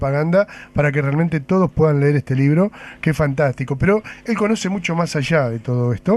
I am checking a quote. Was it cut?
yes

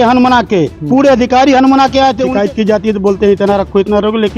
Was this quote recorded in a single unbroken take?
no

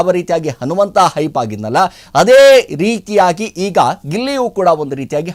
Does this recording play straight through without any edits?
yes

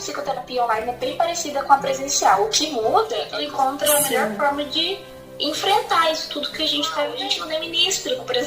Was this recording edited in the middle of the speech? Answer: yes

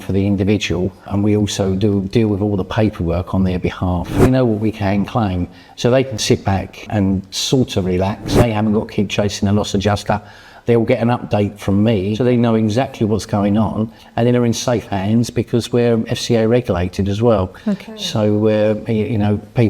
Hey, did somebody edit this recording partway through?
yes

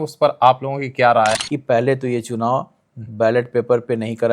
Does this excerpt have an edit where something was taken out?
yes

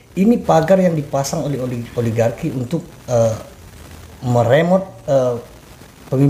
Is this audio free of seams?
yes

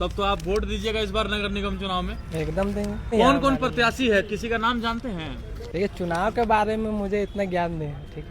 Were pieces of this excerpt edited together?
yes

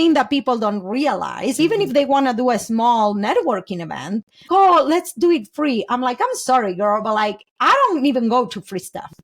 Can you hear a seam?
yes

